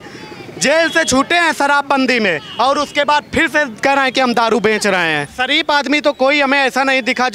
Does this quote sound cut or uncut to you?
cut